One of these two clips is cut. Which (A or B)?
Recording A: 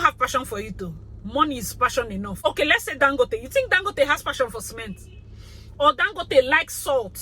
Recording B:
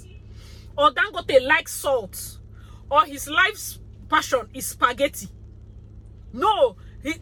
A